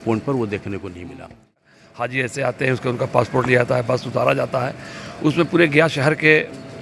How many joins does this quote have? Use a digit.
1